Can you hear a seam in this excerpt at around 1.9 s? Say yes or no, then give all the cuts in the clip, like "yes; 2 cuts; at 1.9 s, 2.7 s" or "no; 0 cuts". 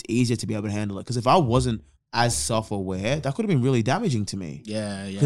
yes; 1 cut; at 1.9 s